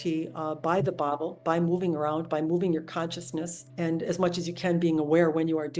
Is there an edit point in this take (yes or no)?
yes